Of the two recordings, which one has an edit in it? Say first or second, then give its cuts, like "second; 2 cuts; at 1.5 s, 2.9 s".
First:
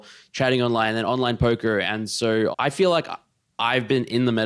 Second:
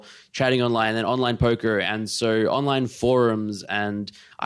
first; 1 cut; at 2.5 s